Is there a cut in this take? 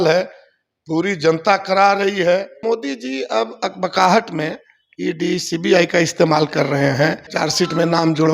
yes; 2 cuts; at 2.6 s, 7.3 s

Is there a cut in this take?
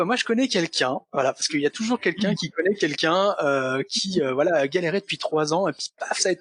no; 0 cuts

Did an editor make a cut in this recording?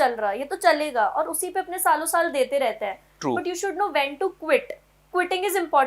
no; 0 cuts

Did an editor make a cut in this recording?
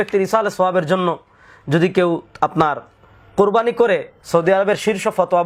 no; 0 cuts

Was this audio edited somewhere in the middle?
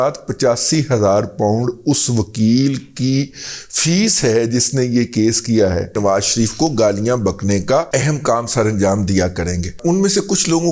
yes; 3 cuts; at 6.0 s, 7.9 s, 9.7 s

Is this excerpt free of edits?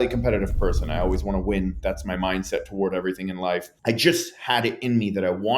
no; 1 cut; at 3.7 s

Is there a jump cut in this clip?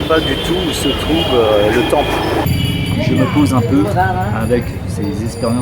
yes; 1 cut; at 2.5 s

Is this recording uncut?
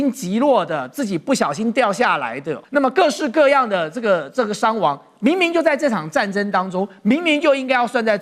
no; 1 cut; at 2.5 s

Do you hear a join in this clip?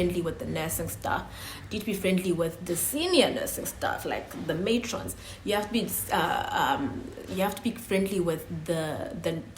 no; 0 cuts

